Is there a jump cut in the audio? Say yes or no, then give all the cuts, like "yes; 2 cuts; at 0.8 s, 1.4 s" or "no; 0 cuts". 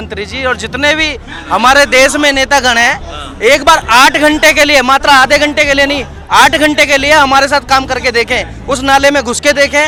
no; 0 cuts